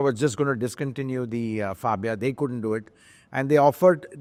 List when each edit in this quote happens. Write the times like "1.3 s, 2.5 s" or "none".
none